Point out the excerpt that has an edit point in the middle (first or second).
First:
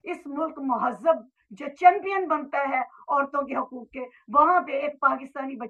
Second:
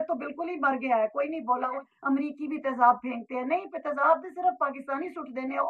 second